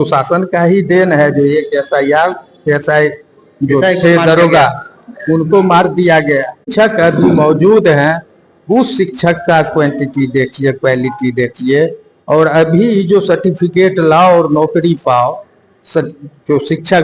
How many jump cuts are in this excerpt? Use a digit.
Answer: 1